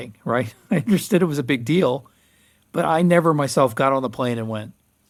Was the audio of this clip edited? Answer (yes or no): no